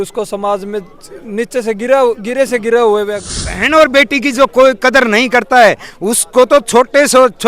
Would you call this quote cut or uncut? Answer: cut